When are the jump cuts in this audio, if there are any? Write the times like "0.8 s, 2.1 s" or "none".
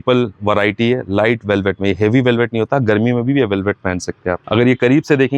4.4 s